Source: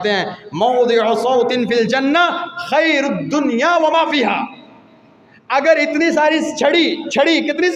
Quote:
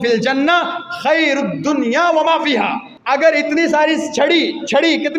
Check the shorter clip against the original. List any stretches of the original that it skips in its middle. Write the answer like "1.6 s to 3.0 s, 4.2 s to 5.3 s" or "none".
4.6 s to 5.3 s

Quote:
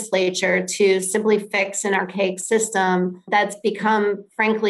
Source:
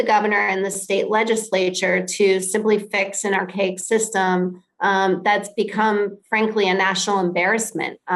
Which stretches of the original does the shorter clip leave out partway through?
4.7 s to 5.2 s

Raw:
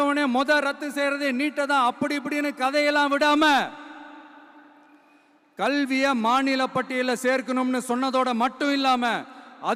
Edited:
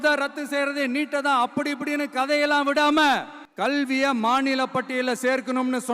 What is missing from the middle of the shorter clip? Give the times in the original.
3.8 s to 5.4 s

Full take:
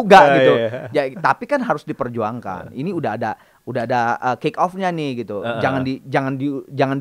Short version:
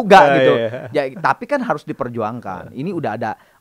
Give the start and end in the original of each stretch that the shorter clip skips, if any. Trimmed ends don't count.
none

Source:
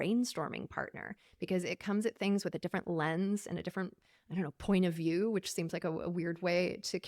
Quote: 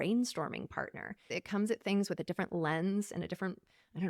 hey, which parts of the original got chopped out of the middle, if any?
1.3 s to 1.7 s

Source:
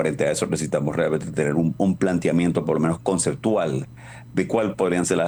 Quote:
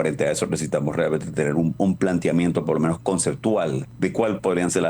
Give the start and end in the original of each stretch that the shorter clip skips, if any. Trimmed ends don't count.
3.8 s to 4.2 s

